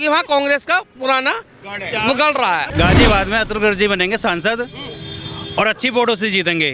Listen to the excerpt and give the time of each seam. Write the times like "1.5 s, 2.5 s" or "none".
2.7 s

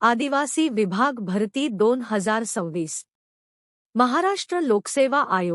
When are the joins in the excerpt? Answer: 4.6 s

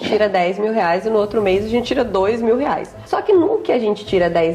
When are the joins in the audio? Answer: 2.9 s

